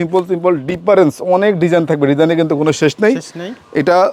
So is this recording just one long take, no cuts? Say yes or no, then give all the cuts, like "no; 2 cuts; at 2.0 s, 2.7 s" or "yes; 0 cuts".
yes; 0 cuts